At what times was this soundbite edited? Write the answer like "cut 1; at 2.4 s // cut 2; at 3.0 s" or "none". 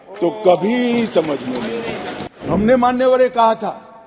cut 1; at 2.5 s